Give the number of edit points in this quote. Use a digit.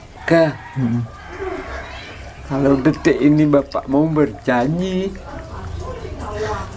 0